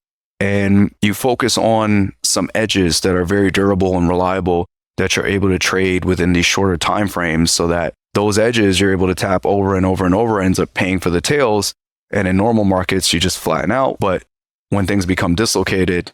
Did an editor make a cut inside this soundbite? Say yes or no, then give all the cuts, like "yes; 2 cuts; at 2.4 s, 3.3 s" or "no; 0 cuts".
no; 0 cuts